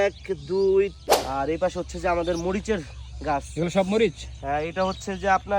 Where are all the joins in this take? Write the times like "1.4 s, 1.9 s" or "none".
1.0 s

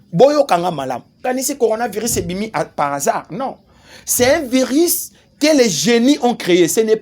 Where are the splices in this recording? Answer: 1.2 s

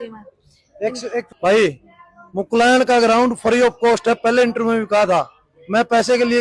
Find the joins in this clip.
1.3 s

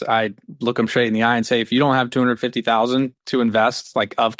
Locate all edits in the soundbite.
3.2 s

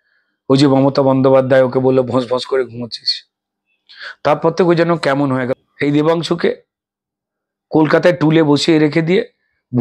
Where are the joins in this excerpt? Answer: 5.5 s

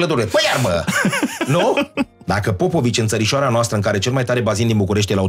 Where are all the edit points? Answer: 2.2 s

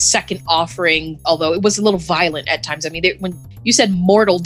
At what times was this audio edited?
1.1 s

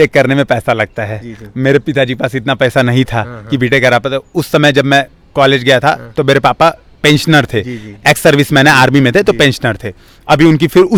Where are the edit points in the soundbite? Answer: none

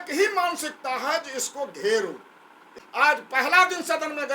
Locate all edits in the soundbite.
2.8 s

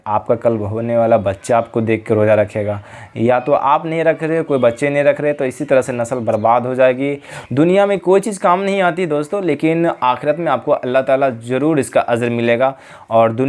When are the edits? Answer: 7.3 s

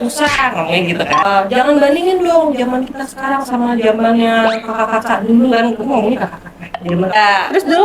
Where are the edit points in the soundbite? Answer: 1.3 s, 7.1 s

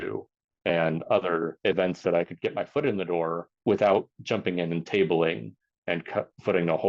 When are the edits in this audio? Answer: 1.6 s, 3.5 s, 4.2 s

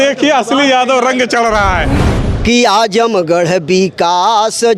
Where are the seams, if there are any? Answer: 2.1 s

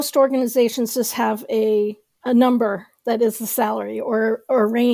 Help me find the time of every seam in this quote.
none

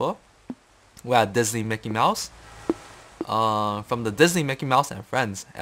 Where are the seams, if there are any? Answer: none

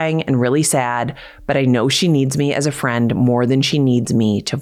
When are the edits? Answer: none

